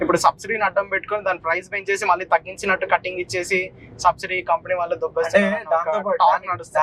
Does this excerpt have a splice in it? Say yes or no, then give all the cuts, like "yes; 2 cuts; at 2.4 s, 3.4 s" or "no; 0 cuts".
no; 0 cuts